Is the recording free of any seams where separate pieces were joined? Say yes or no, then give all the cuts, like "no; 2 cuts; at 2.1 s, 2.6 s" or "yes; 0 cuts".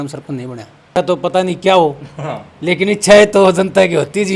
no; 1 cut; at 1.0 s